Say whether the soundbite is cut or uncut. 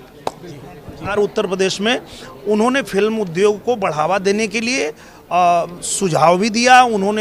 cut